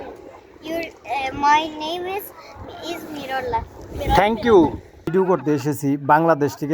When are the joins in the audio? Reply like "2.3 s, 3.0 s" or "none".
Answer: 5.1 s